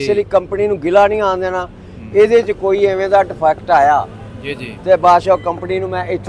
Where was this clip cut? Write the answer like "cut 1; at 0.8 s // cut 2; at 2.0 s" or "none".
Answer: none